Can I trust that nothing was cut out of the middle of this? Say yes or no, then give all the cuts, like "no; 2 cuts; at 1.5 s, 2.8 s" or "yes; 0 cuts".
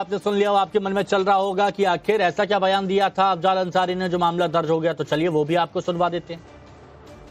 yes; 0 cuts